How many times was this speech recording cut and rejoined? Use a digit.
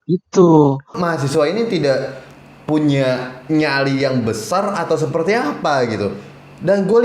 1